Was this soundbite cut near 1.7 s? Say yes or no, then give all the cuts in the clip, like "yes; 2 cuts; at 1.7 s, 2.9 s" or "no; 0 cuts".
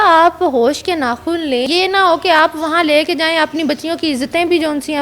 yes; 1 cut; at 1.7 s